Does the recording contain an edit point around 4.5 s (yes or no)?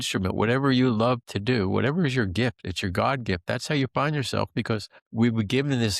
no